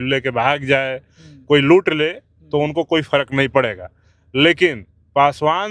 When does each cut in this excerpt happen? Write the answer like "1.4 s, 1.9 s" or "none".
none